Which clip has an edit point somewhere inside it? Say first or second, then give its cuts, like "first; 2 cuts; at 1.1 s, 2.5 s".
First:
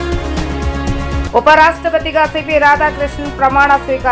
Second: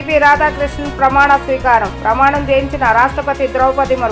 first; 1 cut; at 1.2 s